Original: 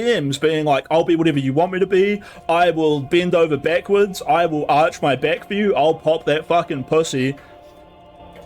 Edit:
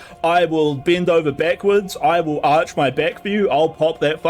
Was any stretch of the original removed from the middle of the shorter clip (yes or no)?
no